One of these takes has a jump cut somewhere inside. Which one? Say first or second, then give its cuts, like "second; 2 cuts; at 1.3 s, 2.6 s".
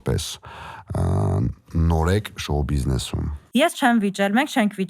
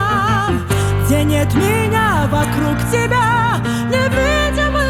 first; 1 cut; at 3.4 s